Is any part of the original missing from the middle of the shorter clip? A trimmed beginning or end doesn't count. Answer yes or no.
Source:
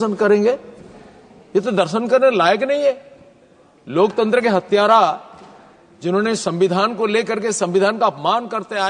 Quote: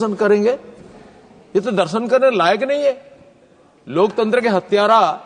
no